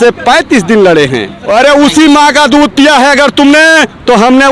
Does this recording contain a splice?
yes; 1 cut; at 1.3 s

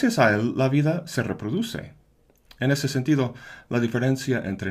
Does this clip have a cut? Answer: yes; 1 cut; at 1.6 s

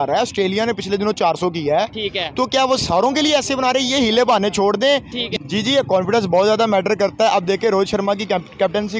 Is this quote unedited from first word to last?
no; 1 cut; at 5.2 s

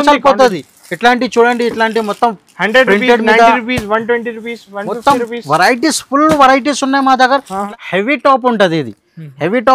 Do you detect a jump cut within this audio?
yes; 1 cut; at 7.6 s

